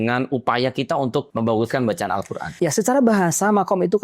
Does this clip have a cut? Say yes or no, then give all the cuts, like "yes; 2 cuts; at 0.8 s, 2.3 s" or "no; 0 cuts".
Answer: yes; 2 cuts; at 1.3 s, 2.4 s